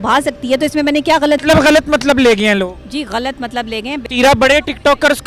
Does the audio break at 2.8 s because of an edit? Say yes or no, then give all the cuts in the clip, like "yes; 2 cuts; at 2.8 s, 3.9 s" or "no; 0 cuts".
no; 2 cuts; at 1.4 s, 4.0 s